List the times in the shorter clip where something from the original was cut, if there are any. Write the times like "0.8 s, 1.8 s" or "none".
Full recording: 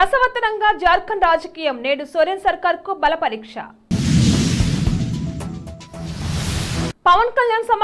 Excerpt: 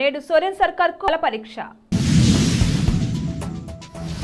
1.1 s